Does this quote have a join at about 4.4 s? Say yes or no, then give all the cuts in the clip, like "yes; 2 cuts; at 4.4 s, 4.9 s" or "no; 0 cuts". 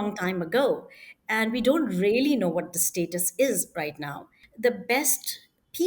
yes; 1 cut; at 4.4 s